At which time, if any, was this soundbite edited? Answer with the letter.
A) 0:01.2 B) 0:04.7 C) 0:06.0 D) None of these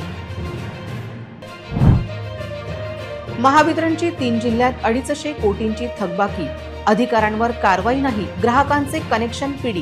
D